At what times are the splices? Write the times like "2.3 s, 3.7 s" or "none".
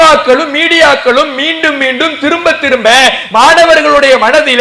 none